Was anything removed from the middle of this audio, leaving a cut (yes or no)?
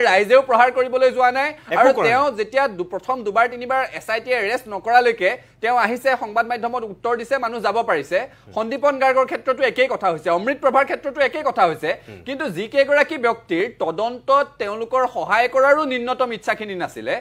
no